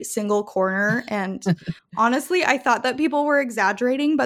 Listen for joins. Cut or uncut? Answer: cut